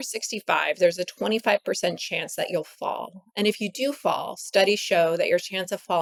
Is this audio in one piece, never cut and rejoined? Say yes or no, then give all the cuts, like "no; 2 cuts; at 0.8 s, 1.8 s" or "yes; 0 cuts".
yes; 0 cuts